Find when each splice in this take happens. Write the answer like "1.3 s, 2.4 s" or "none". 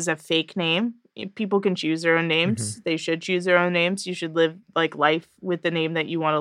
none